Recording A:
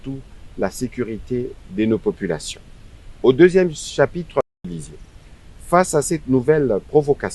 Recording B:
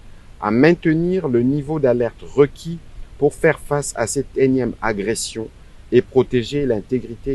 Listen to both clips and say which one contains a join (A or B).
A